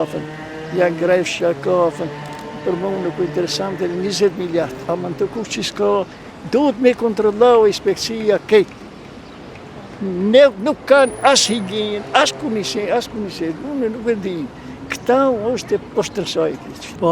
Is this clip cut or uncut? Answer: uncut